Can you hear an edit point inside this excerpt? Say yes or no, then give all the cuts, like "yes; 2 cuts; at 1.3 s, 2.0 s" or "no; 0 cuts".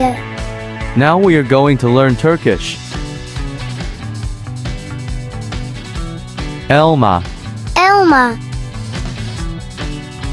yes; 3 cuts; at 3.2 s, 6.0 s, 8.4 s